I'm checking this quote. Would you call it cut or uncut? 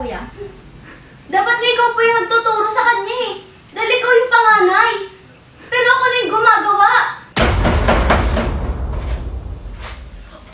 cut